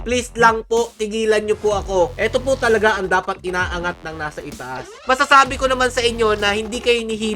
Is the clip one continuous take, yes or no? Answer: no